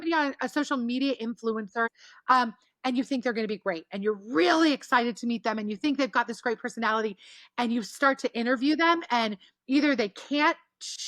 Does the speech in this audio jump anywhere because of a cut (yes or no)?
yes